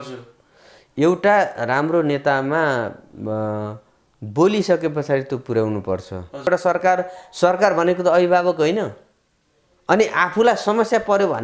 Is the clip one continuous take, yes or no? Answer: no